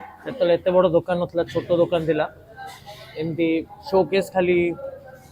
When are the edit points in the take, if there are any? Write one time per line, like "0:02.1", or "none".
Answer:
none